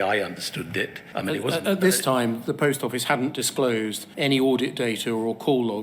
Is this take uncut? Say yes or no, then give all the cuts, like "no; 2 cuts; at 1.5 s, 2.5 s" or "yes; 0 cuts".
no; 2 cuts; at 1.0 s, 4.0 s